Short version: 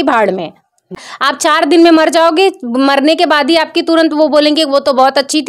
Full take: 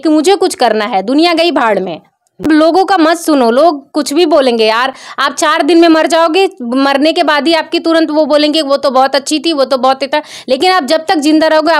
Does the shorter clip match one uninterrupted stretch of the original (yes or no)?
no